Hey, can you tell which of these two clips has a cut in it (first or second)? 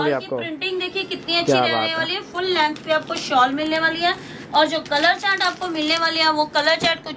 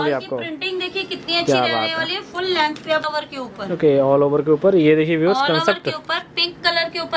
second